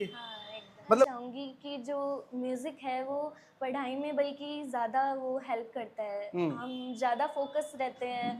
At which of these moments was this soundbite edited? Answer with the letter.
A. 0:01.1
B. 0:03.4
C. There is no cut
A